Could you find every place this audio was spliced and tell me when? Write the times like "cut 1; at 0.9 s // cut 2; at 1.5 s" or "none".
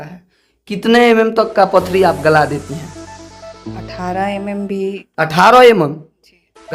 none